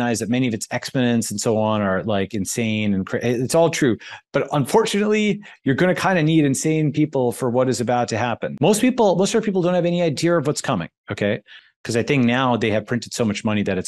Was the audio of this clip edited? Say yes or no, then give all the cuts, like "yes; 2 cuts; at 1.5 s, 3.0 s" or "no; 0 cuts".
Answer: yes; 2 cuts; at 8.5 s, 11.5 s